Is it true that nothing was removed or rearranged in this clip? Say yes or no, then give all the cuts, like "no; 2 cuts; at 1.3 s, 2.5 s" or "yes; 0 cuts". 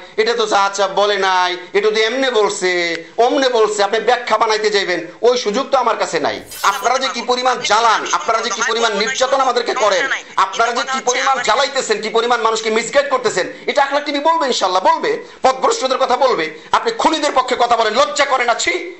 no; 1 cut; at 6.5 s